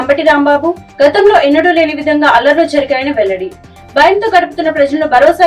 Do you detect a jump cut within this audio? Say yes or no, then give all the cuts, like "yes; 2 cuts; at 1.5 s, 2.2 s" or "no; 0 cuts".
no; 0 cuts